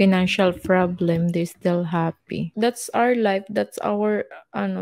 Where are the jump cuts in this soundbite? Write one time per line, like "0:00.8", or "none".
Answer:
0:02.5